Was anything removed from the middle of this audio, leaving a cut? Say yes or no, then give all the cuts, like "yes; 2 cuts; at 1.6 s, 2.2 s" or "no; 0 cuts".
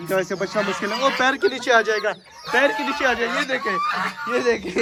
no; 0 cuts